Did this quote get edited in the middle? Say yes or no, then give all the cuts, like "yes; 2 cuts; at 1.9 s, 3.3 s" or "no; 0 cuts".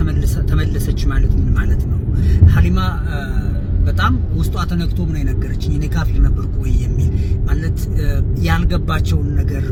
no; 0 cuts